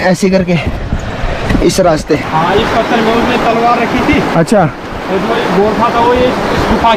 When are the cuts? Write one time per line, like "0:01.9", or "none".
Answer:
0:02.2